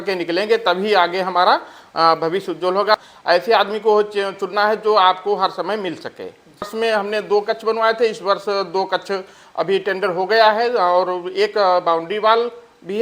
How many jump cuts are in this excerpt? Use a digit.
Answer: 2